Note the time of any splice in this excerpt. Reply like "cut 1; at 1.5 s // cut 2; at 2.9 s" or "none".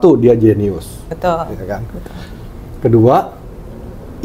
cut 1; at 1.1 s